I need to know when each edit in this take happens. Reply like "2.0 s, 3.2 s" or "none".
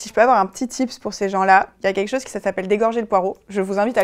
none